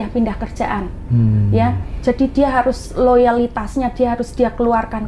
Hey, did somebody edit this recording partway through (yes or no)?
no